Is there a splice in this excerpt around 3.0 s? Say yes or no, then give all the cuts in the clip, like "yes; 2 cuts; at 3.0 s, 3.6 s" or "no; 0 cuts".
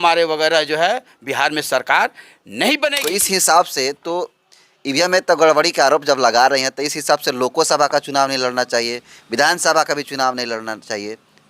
yes; 1 cut; at 3.0 s